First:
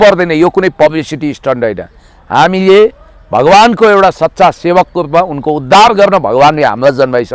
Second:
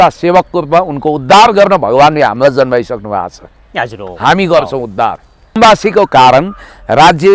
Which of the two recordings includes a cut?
second; 1 cut; at 5.6 s

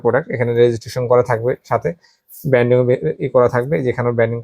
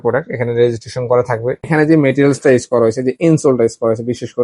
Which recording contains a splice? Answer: second; 1 cut; at 1.6 s

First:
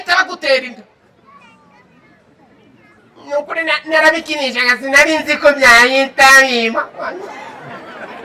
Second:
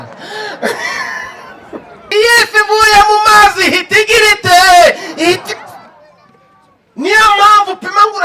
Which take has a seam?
second; 1 cut; at 2.0 s

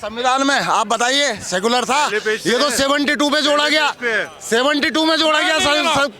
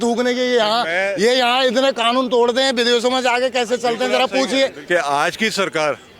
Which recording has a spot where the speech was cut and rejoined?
second; 1 cut; at 4.8 s

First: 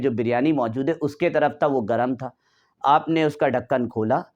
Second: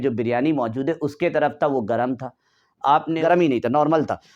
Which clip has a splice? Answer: second; 1 cut; at 3.2 s

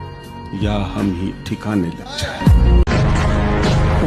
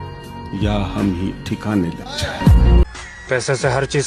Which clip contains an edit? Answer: first; 1 cut; at 3.0 s

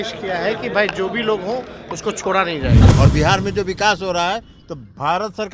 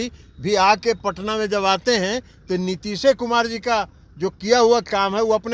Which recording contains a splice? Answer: first; 1 cut; at 2.9 s

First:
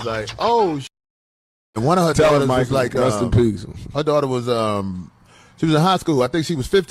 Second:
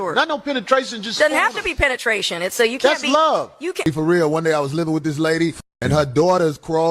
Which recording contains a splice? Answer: second; 1 cut; at 3.8 s

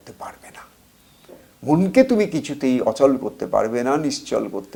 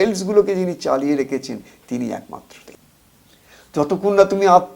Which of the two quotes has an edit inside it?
second; 1 cut; at 2.6 s

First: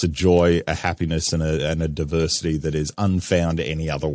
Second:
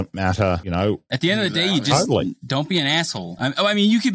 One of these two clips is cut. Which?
second; 2 cuts; at 1.1 s, 3.3 s

